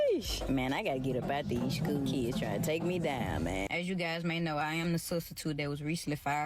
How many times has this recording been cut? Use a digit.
1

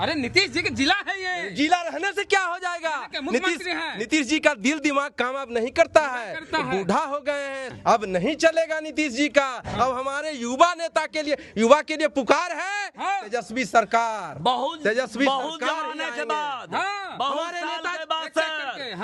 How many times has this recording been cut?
0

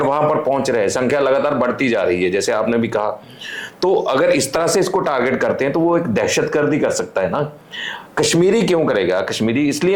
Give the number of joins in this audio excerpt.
0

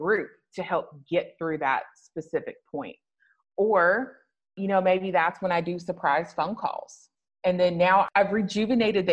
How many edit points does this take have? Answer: 1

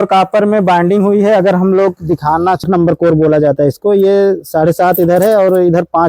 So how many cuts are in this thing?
1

